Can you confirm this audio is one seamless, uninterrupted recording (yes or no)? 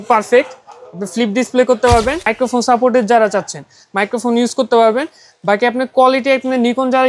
no